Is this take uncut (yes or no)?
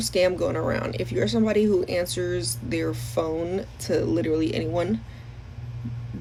yes